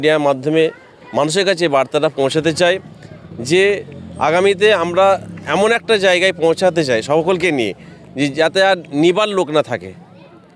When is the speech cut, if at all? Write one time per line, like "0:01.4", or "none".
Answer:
none